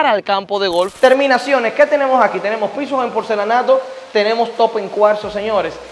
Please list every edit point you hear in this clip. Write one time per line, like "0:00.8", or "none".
0:00.9